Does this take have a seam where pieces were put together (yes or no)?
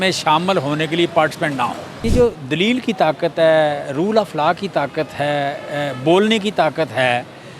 yes